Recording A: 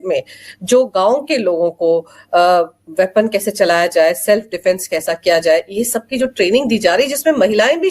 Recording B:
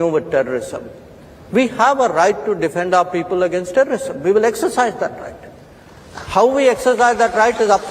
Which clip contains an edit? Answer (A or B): B